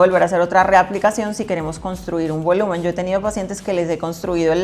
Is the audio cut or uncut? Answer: uncut